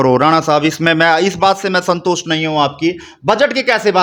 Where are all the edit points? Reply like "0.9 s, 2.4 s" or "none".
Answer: none